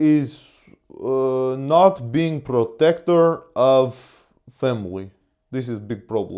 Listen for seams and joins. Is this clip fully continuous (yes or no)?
yes